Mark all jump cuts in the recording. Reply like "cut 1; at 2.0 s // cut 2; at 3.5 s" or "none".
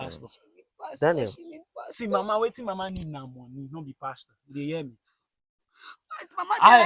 none